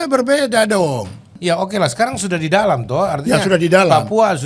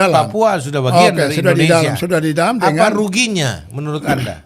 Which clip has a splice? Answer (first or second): first